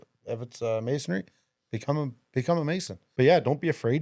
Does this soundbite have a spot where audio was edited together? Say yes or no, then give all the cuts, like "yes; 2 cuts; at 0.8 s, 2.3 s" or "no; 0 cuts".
yes; 1 cut; at 3.0 s